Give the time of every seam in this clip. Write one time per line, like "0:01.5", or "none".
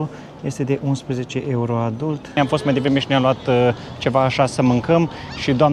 0:02.4